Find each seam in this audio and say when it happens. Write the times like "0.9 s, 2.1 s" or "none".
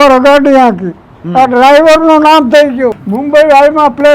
3.1 s